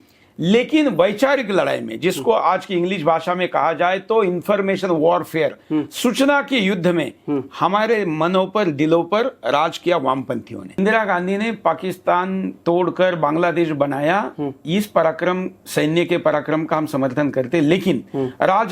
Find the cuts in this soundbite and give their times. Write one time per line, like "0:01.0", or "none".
0:10.8

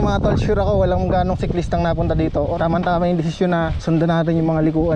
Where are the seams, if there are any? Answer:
0:02.5
0:03.8

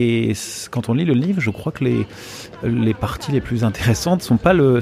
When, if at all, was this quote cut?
none

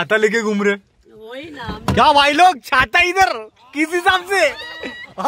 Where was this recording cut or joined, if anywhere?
none

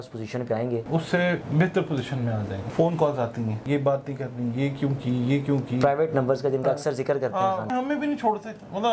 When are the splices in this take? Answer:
0:01.2
0:02.6
0:03.6
0:07.7

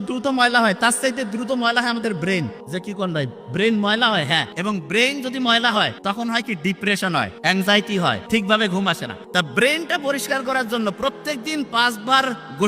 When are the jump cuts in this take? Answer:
0:02.6
0:04.5
0:06.0
0:07.3
0:08.2
0:09.1

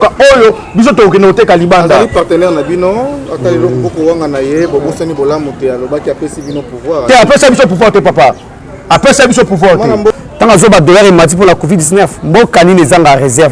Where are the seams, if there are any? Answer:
0:10.2

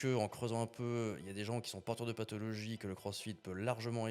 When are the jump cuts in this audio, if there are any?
none

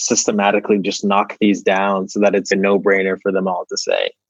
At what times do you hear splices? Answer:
0:02.5

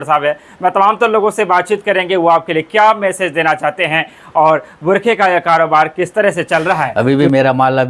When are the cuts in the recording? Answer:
0:06.9

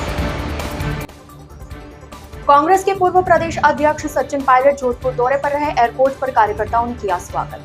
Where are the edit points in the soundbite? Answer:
0:01.1

